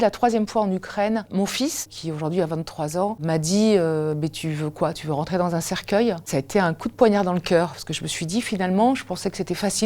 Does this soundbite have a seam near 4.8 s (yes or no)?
no